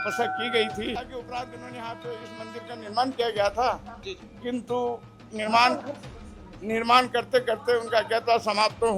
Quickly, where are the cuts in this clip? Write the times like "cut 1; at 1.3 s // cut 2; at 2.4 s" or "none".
cut 1; at 1.0 s